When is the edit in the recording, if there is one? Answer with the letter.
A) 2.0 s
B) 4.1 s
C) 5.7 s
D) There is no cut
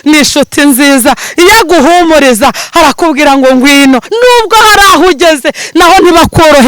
B